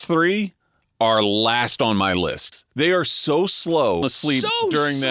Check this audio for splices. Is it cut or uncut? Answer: cut